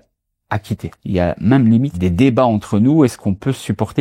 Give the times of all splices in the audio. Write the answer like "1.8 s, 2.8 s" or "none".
0.9 s, 1.9 s